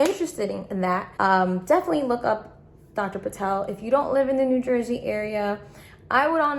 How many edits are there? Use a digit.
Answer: 1